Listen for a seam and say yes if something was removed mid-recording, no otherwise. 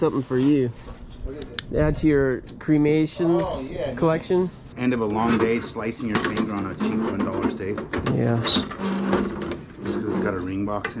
yes